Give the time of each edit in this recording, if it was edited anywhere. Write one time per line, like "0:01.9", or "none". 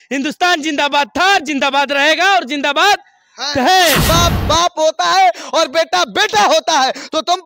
0:04.0

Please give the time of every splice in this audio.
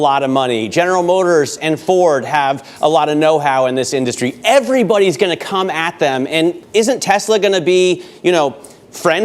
0:06.6

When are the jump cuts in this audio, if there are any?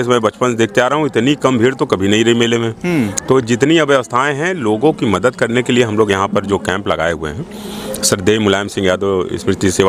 none

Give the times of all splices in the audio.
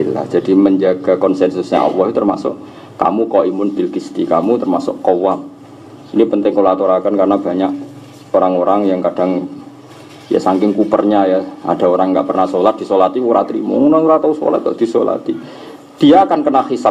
none

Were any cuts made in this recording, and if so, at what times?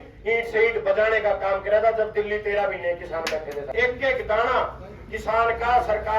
0:03.7

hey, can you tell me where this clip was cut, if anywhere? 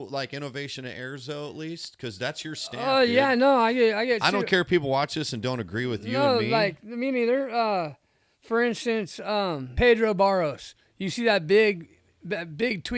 0:09.7

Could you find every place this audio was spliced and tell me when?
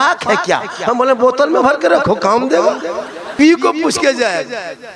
0:03.4

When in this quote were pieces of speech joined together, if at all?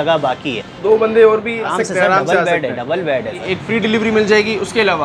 0:00.8
0:01.7
0:03.5

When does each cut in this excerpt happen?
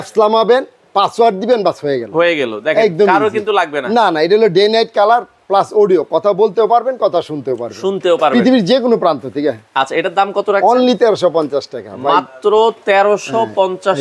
none

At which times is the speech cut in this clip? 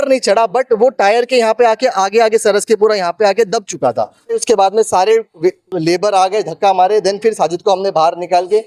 0:04.4

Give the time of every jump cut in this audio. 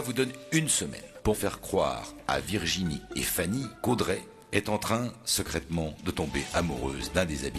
0:01.4
0:04.3

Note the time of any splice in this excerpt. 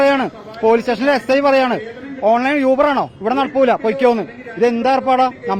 none

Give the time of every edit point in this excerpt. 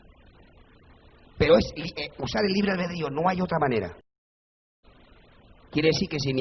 0:04.8

